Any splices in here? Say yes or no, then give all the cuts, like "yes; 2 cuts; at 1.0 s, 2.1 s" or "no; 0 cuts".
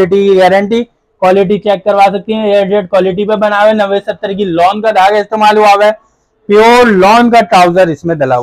no; 0 cuts